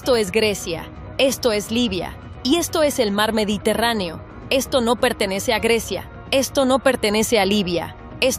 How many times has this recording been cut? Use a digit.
0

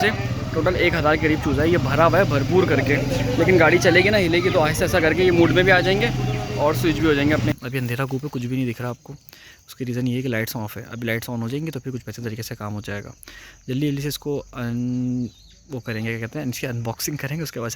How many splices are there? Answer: 1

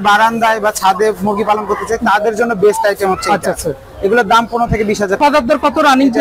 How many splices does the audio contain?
1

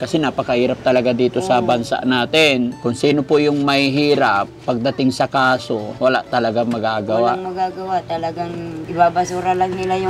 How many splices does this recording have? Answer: 3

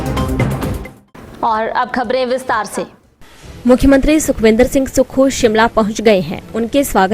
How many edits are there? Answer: 1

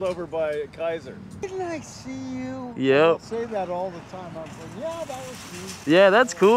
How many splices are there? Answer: 1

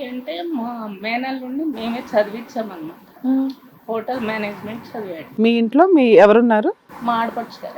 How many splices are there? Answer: 2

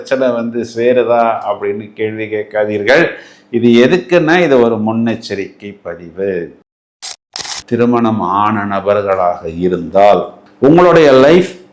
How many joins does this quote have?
1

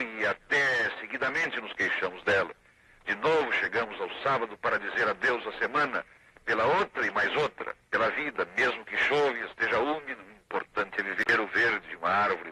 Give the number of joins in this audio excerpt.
1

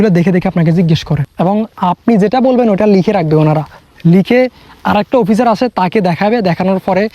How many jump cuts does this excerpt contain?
1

